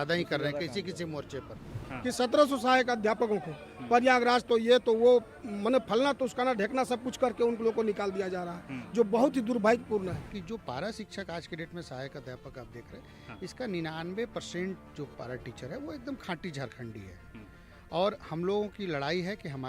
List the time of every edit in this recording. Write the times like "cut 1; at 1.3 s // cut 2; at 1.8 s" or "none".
cut 1; at 1.8 s // cut 2; at 10.3 s

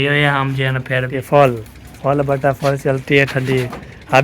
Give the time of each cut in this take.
cut 1; at 1.1 s

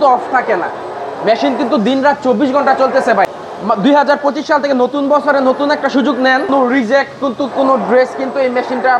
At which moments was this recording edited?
cut 1; at 3.3 s // cut 2; at 6.5 s

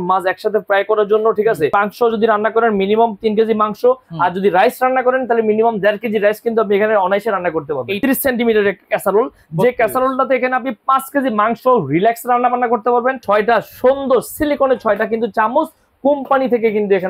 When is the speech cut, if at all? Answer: cut 1; at 1.7 s // cut 2; at 7.9 s // cut 3; at 13.2 s

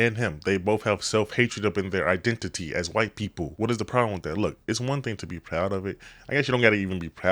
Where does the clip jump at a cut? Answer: cut 1; at 3.5 s

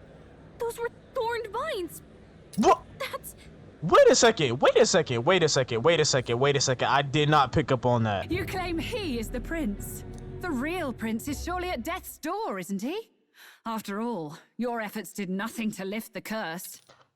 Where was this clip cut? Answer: cut 1; at 8.2 s

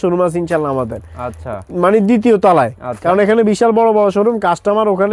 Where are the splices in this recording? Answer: none

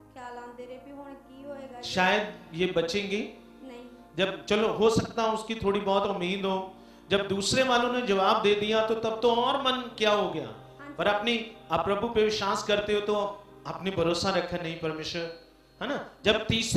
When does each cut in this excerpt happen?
none

